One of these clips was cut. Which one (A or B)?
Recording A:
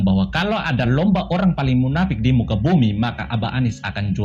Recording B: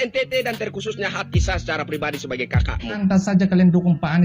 B